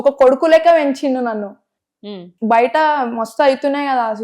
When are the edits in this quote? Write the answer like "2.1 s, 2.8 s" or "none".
2.0 s

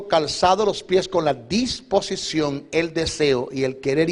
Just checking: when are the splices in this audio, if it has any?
3.1 s

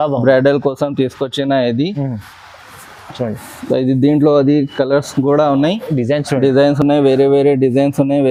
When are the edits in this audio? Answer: none

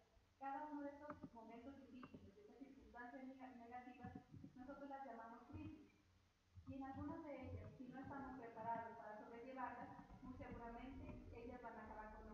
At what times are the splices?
none

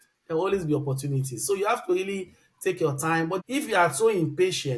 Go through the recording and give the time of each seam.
3.4 s

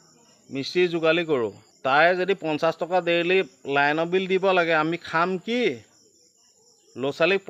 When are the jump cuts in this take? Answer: 1.7 s

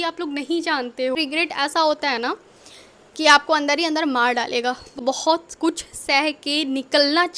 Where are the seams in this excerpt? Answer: 1.2 s, 5.0 s

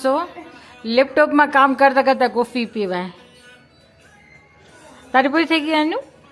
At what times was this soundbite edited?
none

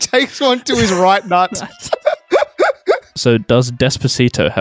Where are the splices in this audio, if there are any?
3.1 s

